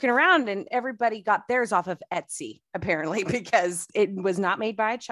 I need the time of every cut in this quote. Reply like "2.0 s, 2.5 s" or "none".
3.8 s